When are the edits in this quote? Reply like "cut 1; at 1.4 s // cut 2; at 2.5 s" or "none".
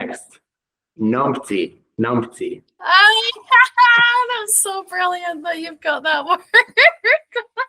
none

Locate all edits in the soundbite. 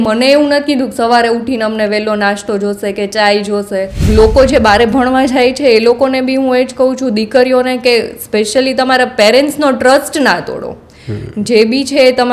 cut 1; at 4.0 s

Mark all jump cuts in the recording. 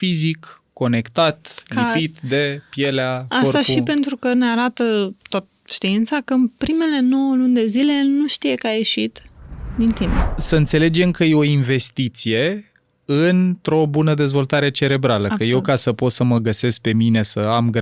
cut 1; at 10.2 s

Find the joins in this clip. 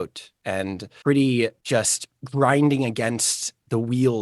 none

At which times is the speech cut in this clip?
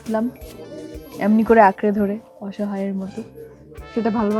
none

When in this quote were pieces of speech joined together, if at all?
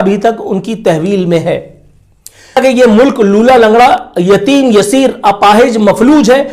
cut 1; at 2.6 s

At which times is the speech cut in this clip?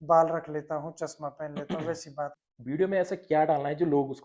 cut 1; at 2.5 s

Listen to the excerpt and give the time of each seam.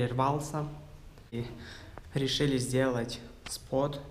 cut 1; at 1.3 s

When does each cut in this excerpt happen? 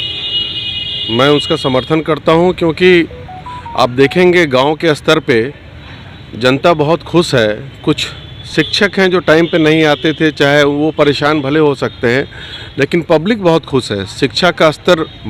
none

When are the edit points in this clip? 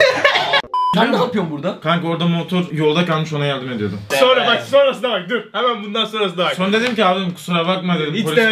cut 1; at 0.9 s

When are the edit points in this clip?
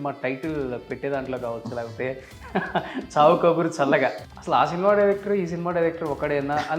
cut 1; at 4.2 s

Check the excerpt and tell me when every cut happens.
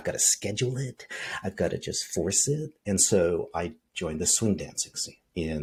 none

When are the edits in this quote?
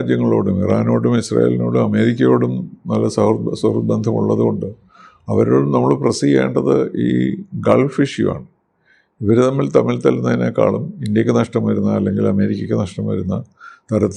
none

